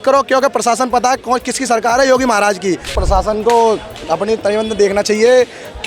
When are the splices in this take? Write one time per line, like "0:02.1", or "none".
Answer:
0:03.0

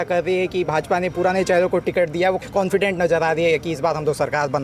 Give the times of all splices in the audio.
0:02.4

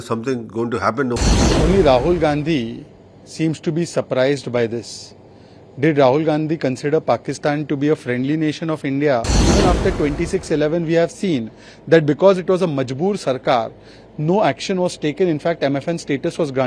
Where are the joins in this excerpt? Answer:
0:01.2
0:09.3

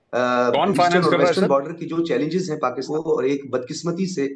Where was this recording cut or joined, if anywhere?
0:02.8

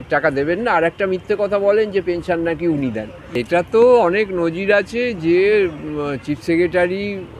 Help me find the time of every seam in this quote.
0:03.4

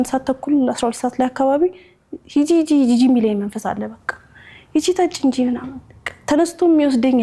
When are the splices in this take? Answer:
none

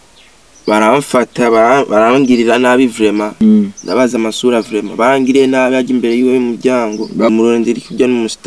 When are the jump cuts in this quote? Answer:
0:03.3
0:07.3

